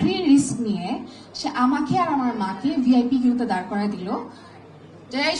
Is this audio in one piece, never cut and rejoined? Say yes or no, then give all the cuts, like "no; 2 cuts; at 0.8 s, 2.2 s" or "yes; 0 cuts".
yes; 0 cuts